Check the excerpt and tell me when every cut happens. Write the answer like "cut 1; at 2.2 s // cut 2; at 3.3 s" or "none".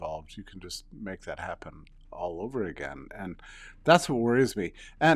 none